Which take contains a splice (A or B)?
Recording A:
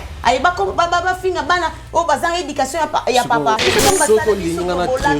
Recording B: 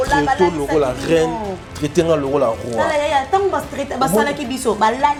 A